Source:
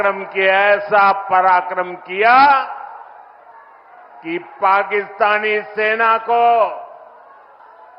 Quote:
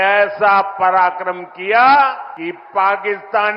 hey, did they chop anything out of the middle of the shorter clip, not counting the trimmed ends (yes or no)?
yes